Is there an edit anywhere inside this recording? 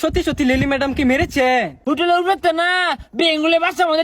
yes; 1 cut; at 1.7 s

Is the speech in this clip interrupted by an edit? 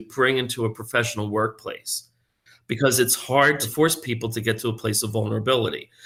no; 0 cuts

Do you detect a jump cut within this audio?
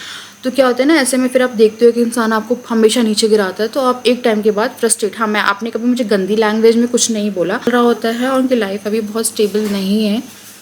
yes; 1 cut; at 7.7 s

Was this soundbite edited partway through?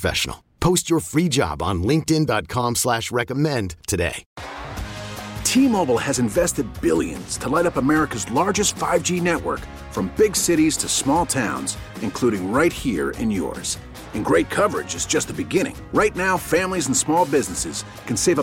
yes; 1 cut; at 4.2 s

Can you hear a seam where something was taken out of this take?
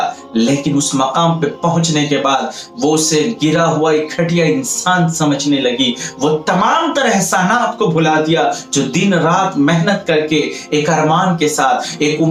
no; 0 cuts

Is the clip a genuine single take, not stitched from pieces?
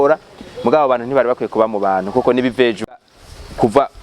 no; 1 cut; at 3.1 s

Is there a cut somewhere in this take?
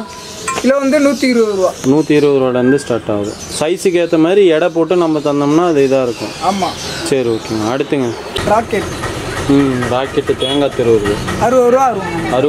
yes; 1 cut; at 8.4 s

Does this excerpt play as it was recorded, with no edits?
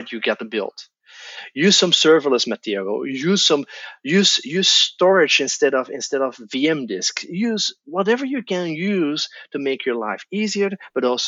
yes; 0 cuts

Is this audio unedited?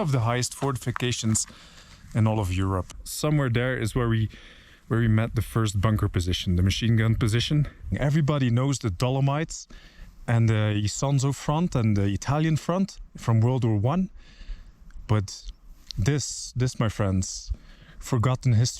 no; 2 cuts; at 3.0 s, 7.9 s

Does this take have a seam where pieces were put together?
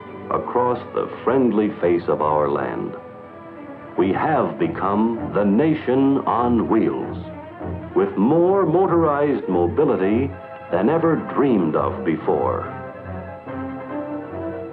yes; 1 cut; at 12.0 s

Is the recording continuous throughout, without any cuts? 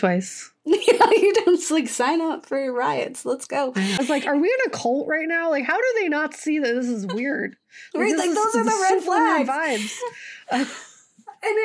no; 1 cut; at 4.0 s

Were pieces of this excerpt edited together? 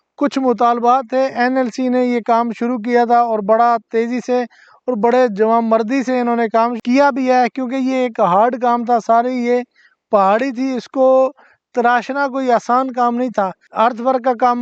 yes; 1 cut; at 13.7 s

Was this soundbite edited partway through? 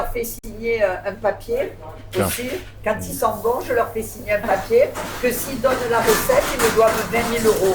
no; 0 cuts

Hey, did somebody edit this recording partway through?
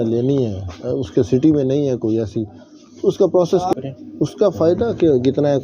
yes; 1 cut; at 3.7 s

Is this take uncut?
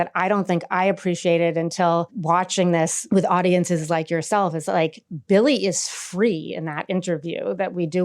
no; 2 cuts; at 2.1 s, 3.0 s

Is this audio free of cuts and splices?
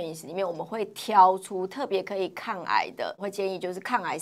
no; 1 cut; at 3.3 s

